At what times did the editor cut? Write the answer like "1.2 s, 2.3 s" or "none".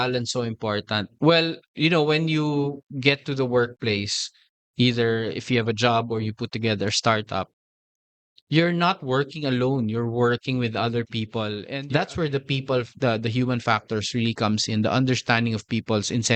11.6 s

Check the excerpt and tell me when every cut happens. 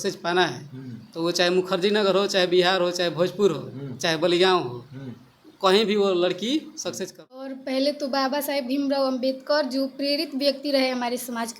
7.5 s

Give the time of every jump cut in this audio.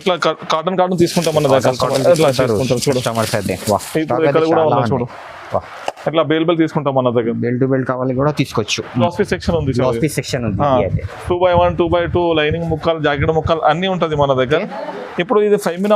9.0 s

